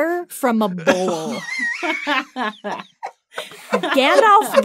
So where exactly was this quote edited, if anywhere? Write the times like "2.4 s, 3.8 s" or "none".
none